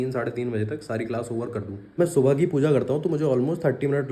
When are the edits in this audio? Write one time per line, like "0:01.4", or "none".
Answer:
0:02.0